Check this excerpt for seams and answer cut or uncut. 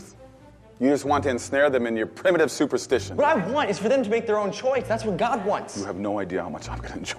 cut